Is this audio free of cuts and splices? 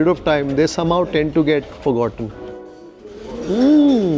no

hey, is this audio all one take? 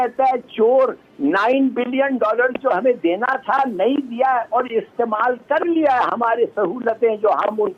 yes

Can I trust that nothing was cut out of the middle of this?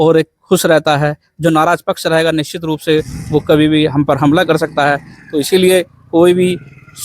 yes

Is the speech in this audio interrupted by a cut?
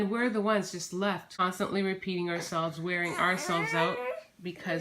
yes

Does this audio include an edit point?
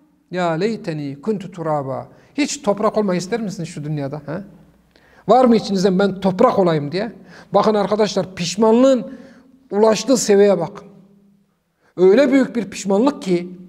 no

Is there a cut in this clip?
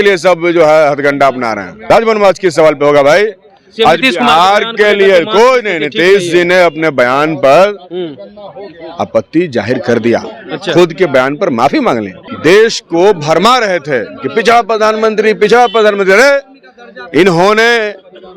yes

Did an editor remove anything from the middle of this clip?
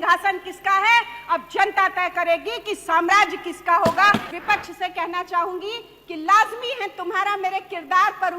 yes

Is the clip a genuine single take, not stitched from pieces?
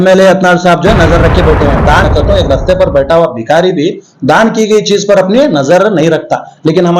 no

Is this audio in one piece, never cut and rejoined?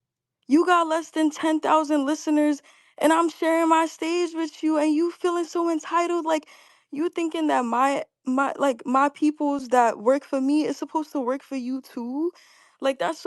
no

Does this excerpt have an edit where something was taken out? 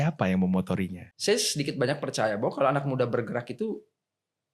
yes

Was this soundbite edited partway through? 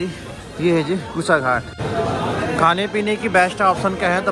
yes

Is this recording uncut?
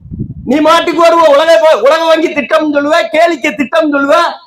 yes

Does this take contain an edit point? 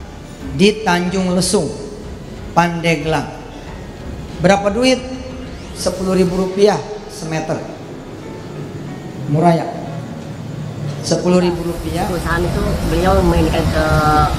yes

